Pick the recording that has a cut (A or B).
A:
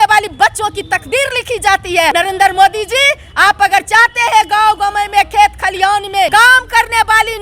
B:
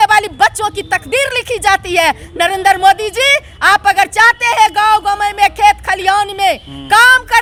A